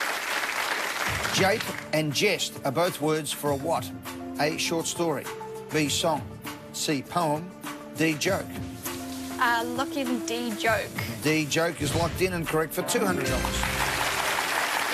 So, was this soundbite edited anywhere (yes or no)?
yes